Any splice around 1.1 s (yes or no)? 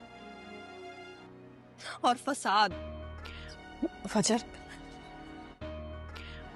yes